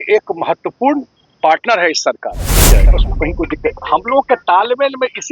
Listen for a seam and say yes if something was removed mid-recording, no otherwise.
yes